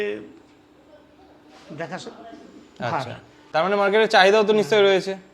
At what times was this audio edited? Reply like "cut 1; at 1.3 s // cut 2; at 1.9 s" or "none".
cut 1; at 3.3 s

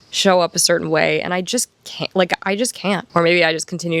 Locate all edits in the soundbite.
cut 1; at 3.1 s

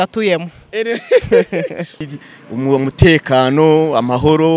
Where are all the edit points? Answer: cut 1; at 2.0 s

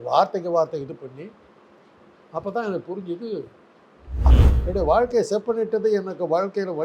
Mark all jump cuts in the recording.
cut 1; at 4.3 s

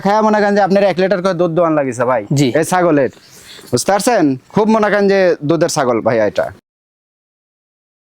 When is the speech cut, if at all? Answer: none

